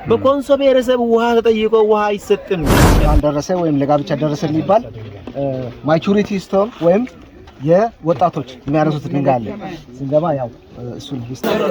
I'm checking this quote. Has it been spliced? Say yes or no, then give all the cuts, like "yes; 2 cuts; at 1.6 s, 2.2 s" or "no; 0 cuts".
yes; 1 cut; at 2.8 s